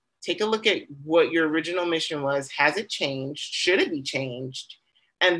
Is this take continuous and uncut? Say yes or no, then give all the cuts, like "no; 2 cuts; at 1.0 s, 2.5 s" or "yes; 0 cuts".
yes; 0 cuts